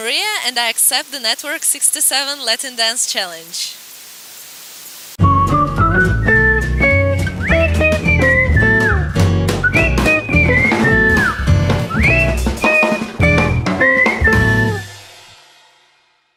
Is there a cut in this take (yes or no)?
no